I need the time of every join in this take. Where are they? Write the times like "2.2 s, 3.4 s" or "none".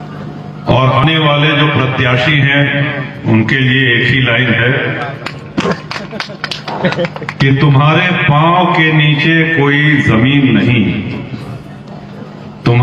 1.0 s